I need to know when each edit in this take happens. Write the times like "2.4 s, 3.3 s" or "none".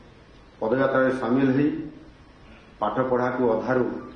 none